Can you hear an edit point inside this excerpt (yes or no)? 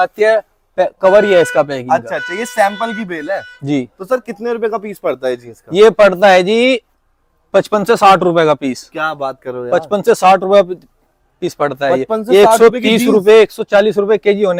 no